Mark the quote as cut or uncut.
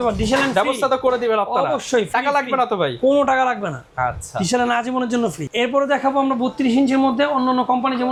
uncut